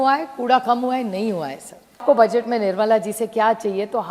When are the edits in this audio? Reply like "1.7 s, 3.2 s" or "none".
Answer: 2.0 s